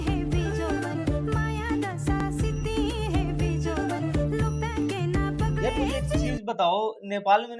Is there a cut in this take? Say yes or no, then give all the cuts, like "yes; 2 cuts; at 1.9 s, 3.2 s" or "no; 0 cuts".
no; 0 cuts